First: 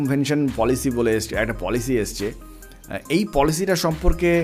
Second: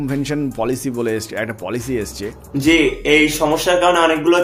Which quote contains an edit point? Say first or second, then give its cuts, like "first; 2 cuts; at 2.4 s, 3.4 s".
second; 1 cut; at 2.5 s